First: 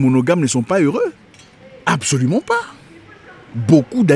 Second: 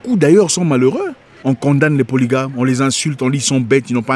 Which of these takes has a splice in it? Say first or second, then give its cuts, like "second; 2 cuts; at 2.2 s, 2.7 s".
second; 1 cut; at 1.3 s